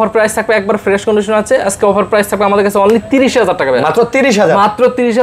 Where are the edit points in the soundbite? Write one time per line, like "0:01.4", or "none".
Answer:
none